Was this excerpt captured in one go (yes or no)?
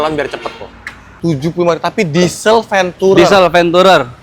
no